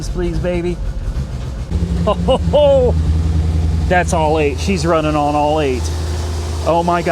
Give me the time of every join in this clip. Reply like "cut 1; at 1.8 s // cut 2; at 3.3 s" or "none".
cut 1; at 1.7 s